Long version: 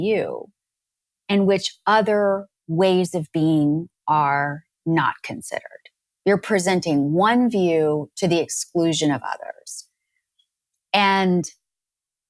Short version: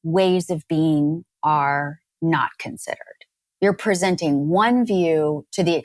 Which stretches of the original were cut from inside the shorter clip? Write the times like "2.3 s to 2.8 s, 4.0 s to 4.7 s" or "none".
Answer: none